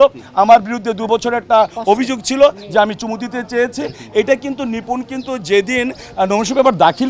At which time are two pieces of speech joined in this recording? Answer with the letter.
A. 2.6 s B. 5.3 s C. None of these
C